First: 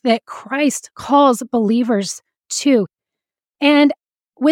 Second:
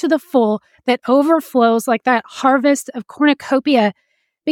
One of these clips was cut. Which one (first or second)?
first